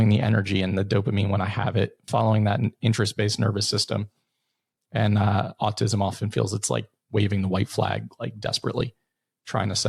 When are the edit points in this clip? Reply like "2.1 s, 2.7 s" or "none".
none